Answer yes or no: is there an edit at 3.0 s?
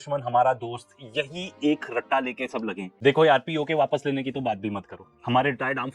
yes